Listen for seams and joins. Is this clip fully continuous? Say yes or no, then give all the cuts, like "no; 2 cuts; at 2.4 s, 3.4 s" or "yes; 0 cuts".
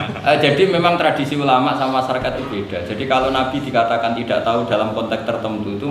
yes; 0 cuts